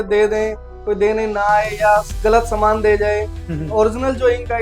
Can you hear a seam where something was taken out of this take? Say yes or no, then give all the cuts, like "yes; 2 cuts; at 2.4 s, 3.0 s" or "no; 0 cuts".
yes; 1 cut; at 3.5 s